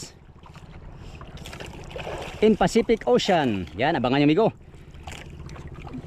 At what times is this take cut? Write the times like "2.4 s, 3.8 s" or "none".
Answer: none